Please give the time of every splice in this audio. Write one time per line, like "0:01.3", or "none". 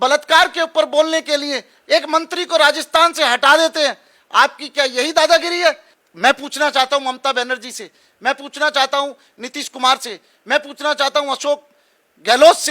0:05.9